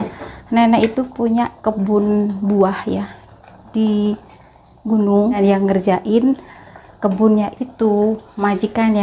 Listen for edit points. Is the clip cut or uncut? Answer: cut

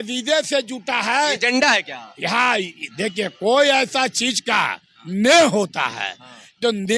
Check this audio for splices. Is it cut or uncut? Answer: uncut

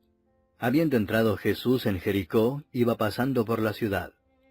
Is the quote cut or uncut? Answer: cut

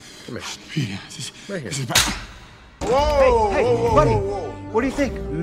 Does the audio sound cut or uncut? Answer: cut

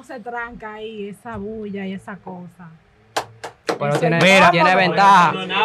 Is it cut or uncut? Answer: uncut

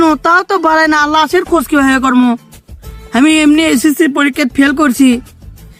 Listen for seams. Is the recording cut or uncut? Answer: uncut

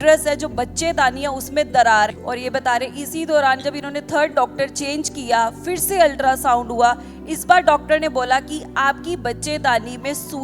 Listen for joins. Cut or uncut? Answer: cut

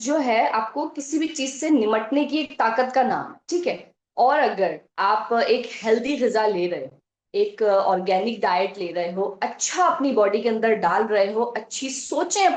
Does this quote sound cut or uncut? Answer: uncut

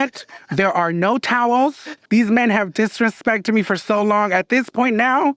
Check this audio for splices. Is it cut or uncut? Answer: cut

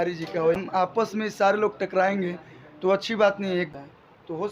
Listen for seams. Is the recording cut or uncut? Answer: cut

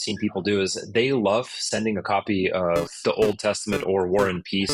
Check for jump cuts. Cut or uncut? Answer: cut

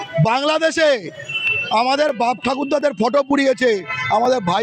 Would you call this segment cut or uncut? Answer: uncut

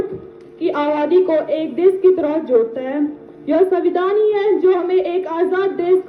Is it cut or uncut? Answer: uncut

